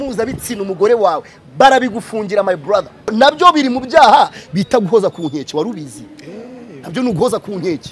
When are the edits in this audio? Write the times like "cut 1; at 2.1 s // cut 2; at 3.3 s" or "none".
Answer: cut 1; at 3.1 s